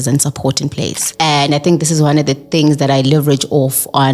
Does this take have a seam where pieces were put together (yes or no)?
yes